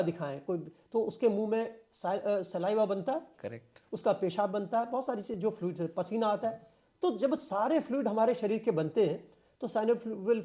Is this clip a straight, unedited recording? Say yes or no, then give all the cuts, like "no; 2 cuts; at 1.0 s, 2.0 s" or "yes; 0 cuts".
yes; 0 cuts